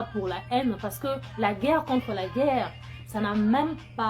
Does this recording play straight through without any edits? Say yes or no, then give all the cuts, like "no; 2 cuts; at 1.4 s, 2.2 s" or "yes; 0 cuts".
yes; 0 cuts